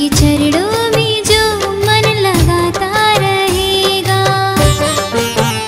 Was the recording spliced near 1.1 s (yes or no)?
no